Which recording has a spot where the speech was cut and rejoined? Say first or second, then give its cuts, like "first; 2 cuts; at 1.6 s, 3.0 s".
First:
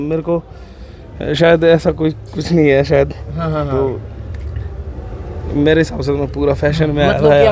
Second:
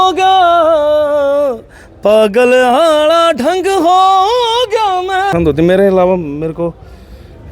second; 1 cut; at 5.3 s